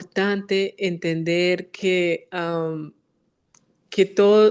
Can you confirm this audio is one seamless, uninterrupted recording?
yes; 0 cuts

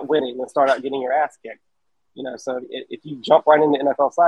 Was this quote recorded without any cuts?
yes; 0 cuts

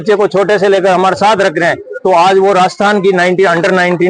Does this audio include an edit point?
no; 0 cuts

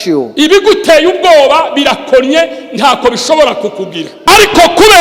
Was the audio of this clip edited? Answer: yes; 1 cut; at 4.1 s

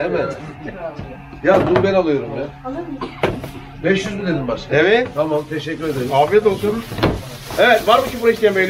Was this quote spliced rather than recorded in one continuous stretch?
no; 0 cuts

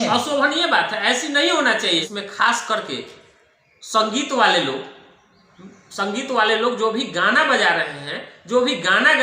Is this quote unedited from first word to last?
no; 1 cut; at 2.1 s

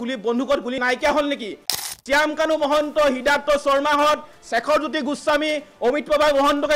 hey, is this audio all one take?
no; 1 cut; at 1.8 s

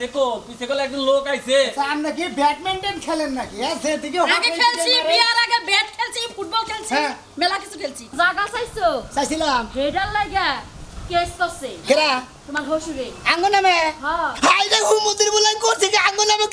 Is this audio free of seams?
no; 1 cut; at 8.1 s

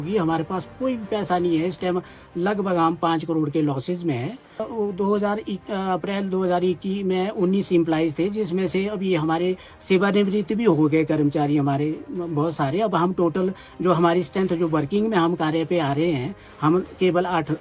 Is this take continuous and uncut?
no; 1 cut; at 4.7 s

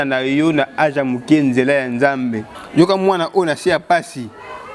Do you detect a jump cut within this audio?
yes; 1 cut; at 2.6 s

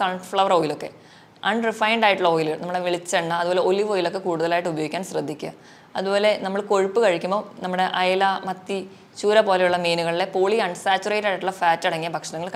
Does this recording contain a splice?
no; 0 cuts

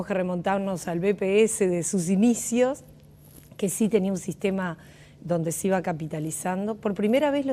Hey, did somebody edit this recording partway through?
yes; 1 cut; at 5.4 s

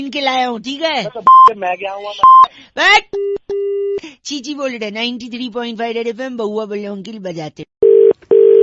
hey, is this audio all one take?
no; 1 cut; at 7.6 s

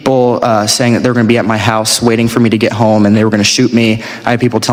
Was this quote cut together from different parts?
no; 0 cuts

